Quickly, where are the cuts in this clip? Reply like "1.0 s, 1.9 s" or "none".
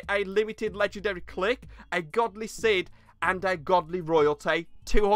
none